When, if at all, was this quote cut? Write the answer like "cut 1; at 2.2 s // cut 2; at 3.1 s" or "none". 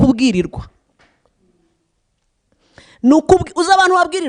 none